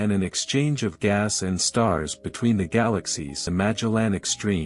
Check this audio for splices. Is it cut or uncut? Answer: cut